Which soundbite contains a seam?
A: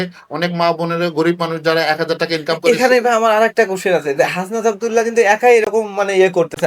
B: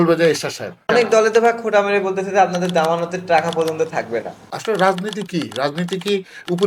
B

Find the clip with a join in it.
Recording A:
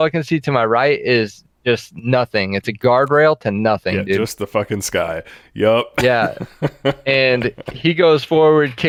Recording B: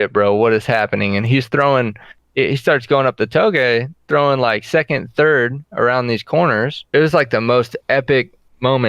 B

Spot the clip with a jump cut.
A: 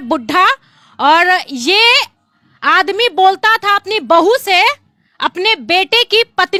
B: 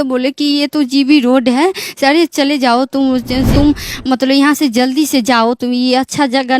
B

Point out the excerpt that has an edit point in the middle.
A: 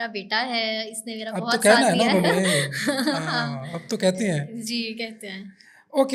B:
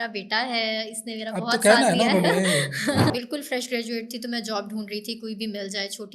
B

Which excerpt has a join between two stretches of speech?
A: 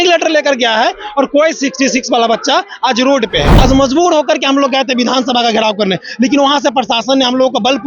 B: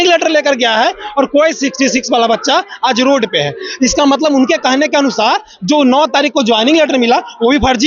A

